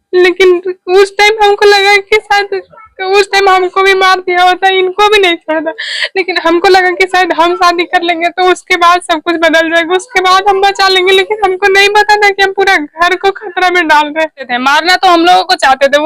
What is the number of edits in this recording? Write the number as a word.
one